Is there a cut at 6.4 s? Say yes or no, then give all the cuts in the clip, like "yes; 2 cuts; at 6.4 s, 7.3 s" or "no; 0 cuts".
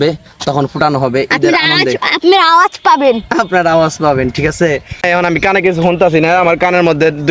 no; 1 cut; at 5.1 s